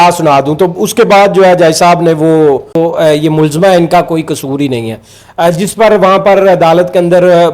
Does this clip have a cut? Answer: yes; 1 cut; at 3.0 s

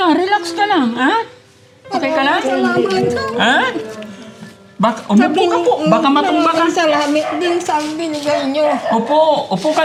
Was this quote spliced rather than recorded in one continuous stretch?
no; 0 cuts

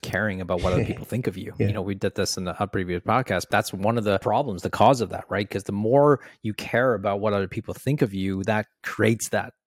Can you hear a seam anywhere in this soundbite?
yes; 2 cuts; at 3.5 s, 4.2 s

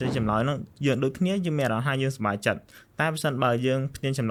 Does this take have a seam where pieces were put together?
no; 0 cuts

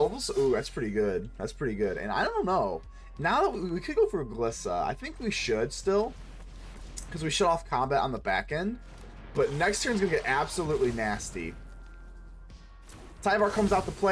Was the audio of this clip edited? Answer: no; 0 cuts

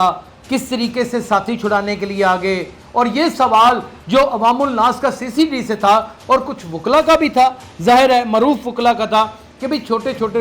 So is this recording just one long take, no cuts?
yes; 0 cuts

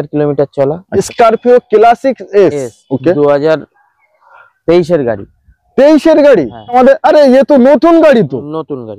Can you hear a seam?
yes; 2 cuts; at 1.0 s, 6.7 s

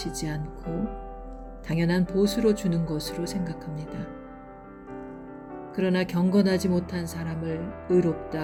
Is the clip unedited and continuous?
yes; 0 cuts

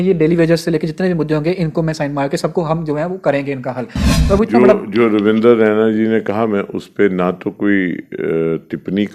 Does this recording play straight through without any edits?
yes; 0 cuts

